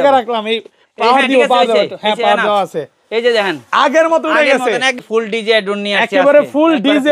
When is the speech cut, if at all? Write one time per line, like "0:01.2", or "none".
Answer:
0:05.0